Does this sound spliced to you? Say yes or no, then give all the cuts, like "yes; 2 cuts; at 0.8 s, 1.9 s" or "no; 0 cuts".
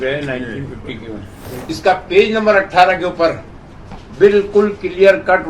yes; 1 cut; at 1.5 s